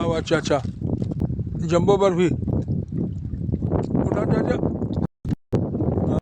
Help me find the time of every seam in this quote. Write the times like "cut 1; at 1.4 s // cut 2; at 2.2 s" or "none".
cut 1; at 1.2 s // cut 2; at 3.7 s